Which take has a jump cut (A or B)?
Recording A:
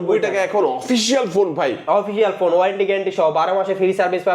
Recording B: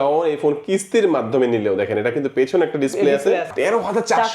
B